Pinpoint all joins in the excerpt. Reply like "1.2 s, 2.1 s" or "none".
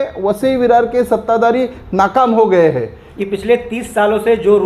3.0 s